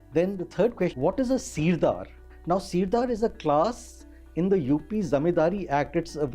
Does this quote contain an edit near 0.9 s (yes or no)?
yes